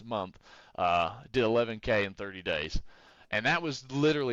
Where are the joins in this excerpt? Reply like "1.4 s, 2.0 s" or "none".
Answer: none